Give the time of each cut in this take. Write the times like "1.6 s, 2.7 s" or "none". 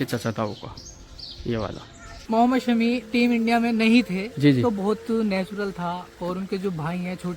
2.3 s